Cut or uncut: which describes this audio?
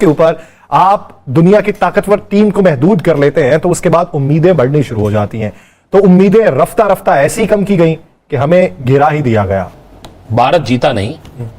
cut